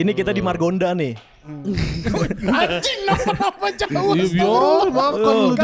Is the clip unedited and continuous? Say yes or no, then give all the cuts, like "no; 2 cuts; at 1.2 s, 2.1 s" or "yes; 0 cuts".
yes; 0 cuts